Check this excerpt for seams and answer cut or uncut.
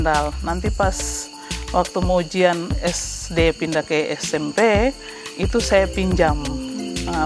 uncut